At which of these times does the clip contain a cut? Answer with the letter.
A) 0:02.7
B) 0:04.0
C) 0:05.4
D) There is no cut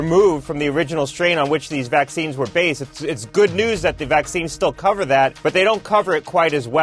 C